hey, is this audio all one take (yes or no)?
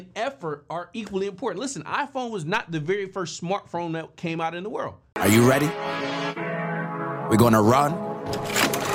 no